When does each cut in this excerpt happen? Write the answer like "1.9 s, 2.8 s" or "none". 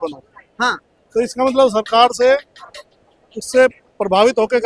none

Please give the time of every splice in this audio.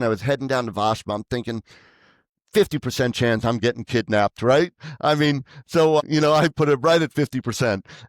6.0 s

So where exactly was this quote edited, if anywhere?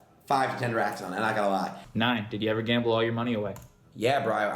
1.8 s

